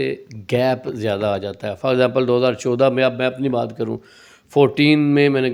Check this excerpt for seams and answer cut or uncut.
uncut